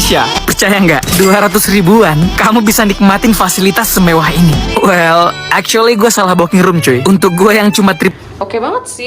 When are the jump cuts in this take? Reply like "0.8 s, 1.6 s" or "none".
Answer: 8.1 s